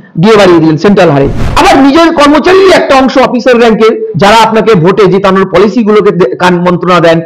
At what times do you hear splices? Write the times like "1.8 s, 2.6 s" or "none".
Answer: 1.4 s